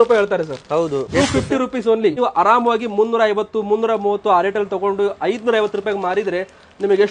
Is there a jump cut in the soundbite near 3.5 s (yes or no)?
no